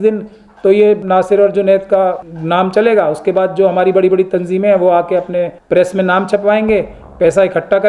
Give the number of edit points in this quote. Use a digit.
3